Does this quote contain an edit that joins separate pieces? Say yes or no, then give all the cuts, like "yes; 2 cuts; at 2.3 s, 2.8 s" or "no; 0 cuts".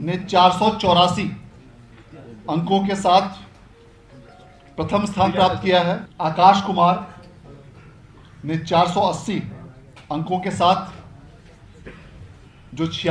yes; 1 cut; at 6.1 s